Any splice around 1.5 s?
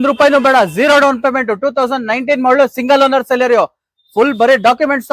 no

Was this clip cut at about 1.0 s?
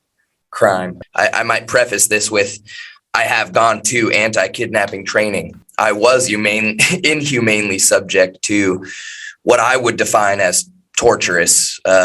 yes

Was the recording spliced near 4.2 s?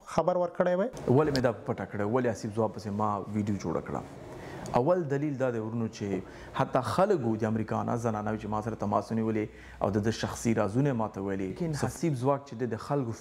no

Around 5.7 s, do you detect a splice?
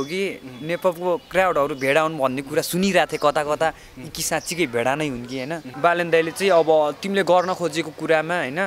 yes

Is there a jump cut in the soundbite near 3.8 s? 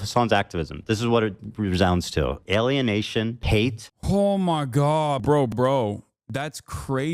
yes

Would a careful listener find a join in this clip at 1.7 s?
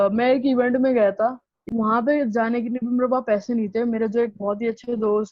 yes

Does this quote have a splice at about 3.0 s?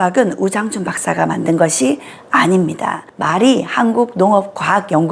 yes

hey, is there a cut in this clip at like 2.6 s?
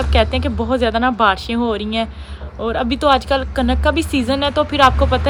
no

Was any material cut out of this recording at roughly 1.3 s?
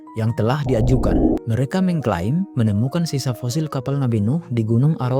yes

